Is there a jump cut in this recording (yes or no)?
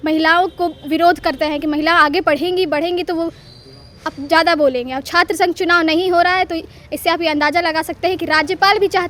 no